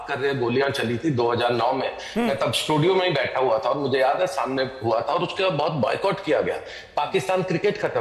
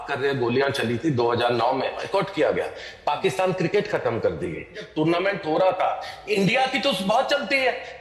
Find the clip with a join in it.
second; 2 cuts; at 2.1 s, 4.9 s

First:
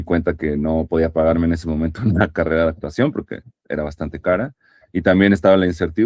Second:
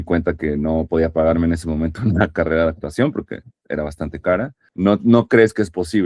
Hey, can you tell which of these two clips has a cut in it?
second; 1 cut; at 4.6 s

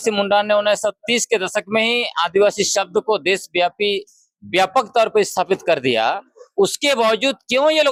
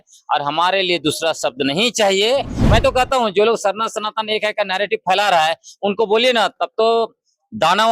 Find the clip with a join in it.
second; 1 cut; at 2.6 s

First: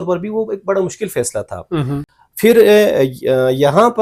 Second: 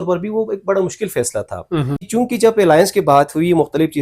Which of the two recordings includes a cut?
second; 1 cut; at 2.0 s

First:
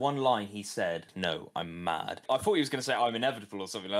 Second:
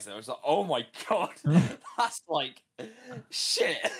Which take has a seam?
first; 2 cuts; at 1.1 s, 2.2 s

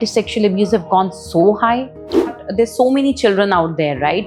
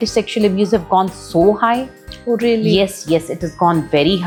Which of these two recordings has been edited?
first; 1 cut; at 2.3 s

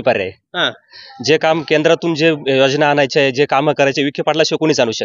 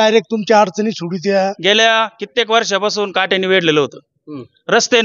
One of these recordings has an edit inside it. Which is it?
second; 1 cut; at 1.6 s

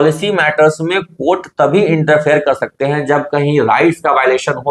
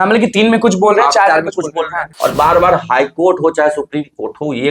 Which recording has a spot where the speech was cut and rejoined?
second; 1 cut; at 2.0 s

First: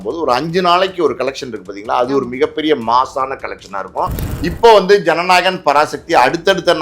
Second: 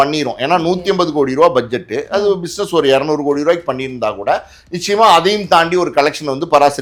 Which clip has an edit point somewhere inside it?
first; 1 cut; at 4.2 s

